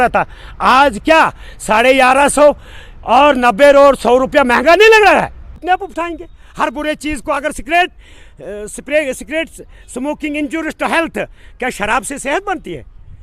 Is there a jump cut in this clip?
yes; 1 cut; at 5.6 s

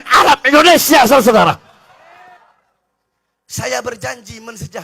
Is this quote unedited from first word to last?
no; 1 cut; at 2.1 s

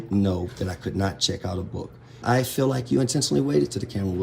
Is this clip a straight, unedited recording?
no; 1 cut; at 2.2 s

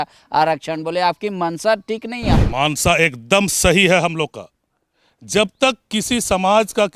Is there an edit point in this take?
yes; 1 cut; at 2.3 s

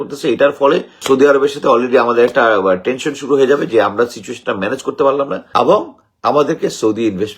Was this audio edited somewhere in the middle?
yes; 2 cuts; at 0.9 s, 5.4 s

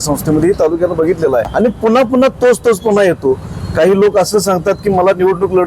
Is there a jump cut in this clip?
yes; 1 cut; at 1.5 s

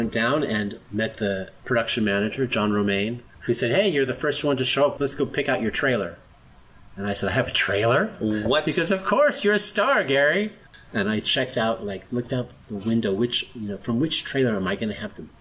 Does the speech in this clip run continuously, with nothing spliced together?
yes; 0 cuts

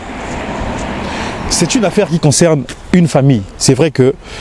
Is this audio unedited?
no; 1 cut; at 1.3 s

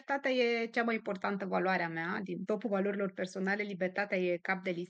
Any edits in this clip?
no; 0 cuts

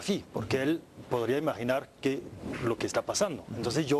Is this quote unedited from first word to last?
no; 1 cut; at 1.9 s

